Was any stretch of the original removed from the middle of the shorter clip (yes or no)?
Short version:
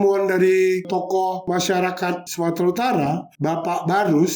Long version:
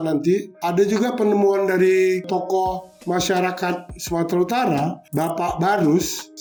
yes